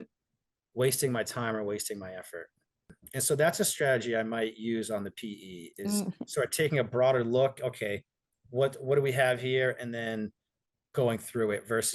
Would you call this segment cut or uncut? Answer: cut